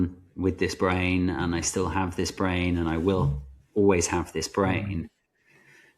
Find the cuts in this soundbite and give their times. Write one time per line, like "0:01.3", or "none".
none